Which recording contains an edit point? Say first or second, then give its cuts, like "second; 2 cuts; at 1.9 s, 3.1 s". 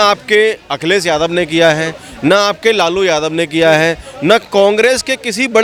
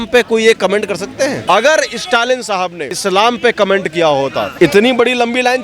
second; 3 cuts; at 1.4 s, 2.9 s, 4.5 s